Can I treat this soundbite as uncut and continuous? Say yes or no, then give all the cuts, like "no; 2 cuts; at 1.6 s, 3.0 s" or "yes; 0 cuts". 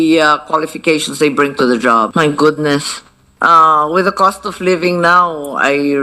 no; 1 cut; at 2.1 s